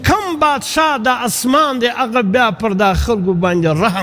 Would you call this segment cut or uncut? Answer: uncut